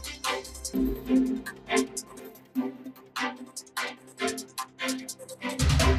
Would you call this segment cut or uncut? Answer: uncut